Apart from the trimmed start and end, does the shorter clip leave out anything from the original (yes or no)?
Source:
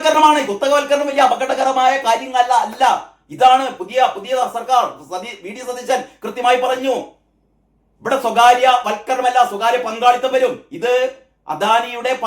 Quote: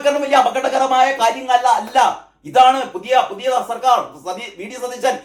no